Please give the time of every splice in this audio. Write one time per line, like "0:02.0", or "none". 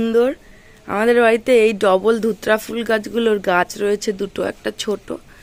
none